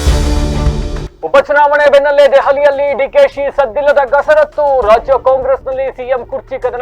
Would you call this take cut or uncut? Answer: cut